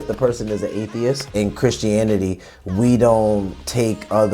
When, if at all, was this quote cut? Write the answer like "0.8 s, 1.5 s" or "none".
1.3 s